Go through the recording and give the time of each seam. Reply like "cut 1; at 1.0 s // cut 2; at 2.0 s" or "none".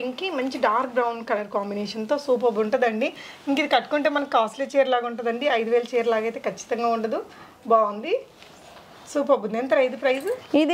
none